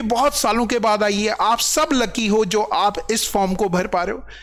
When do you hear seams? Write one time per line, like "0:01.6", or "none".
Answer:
none